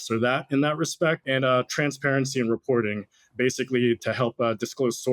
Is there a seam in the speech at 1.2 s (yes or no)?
yes